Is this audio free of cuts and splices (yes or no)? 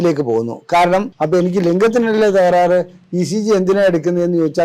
no